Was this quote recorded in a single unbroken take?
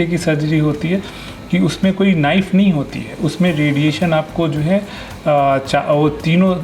yes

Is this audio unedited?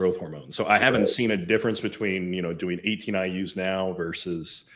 yes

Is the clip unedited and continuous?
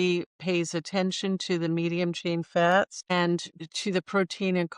no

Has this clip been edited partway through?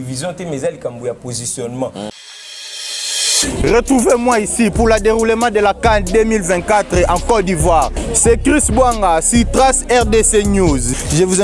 yes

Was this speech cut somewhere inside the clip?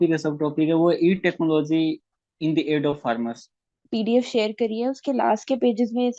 yes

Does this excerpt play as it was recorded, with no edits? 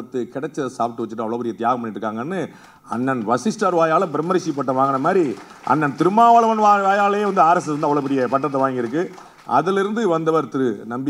yes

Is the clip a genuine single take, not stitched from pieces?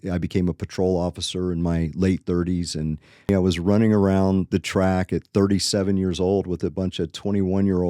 no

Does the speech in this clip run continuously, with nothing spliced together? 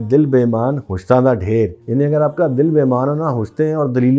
yes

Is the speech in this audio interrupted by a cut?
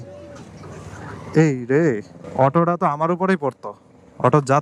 no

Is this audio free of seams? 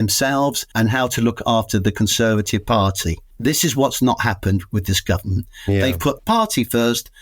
no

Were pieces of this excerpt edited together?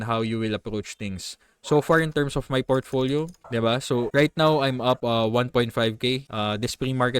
yes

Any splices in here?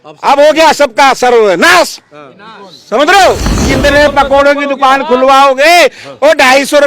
yes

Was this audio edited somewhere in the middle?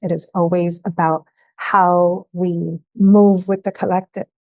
yes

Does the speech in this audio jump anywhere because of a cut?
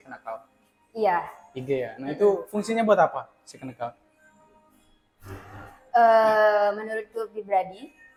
no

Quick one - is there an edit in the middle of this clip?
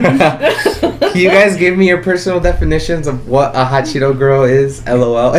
no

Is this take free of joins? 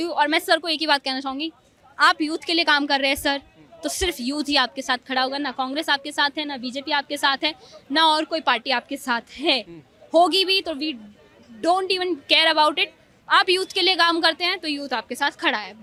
yes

